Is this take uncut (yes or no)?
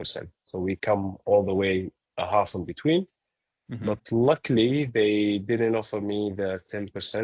yes